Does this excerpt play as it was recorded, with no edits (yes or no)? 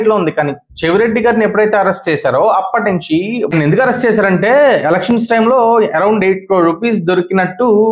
yes